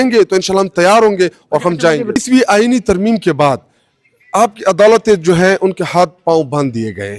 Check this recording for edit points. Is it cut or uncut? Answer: cut